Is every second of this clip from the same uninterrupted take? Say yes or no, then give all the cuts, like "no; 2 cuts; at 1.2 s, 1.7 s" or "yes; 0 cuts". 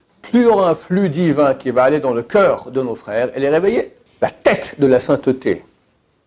no; 1 cut; at 4.0 s